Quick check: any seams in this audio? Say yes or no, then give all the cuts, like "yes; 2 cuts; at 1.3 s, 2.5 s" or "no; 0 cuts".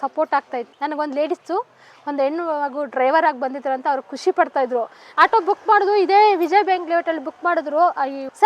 yes; 1 cut; at 5.0 s